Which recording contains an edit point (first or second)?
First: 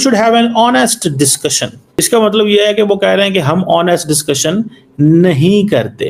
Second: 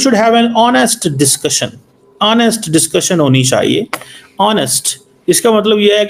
first